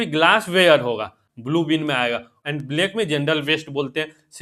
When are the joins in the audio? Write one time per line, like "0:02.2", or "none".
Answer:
0:01.3
0:02.3